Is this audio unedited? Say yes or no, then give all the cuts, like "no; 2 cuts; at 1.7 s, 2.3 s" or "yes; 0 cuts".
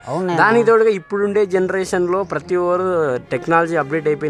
yes; 0 cuts